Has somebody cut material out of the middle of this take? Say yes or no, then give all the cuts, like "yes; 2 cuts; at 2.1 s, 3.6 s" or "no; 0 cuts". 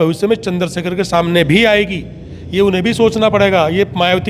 no; 0 cuts